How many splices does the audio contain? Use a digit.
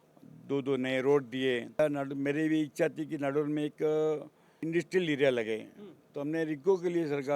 2